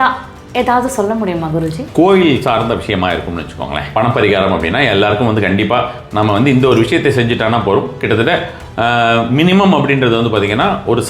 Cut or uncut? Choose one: cut